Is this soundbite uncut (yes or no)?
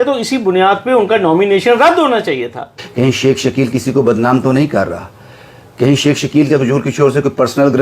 no